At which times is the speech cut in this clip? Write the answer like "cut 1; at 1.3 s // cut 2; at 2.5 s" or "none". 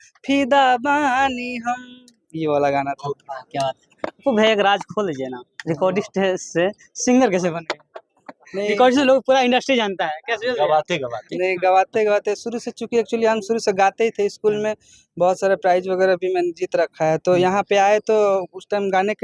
none